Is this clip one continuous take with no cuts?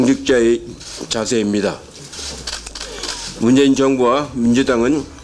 yes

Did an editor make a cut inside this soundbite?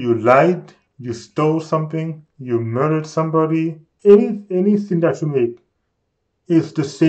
yes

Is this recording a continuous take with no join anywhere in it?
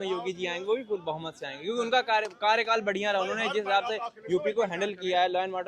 yes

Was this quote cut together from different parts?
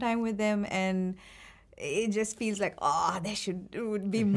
no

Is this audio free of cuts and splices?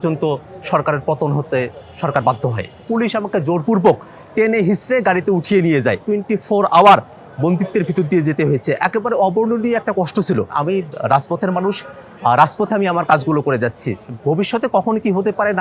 no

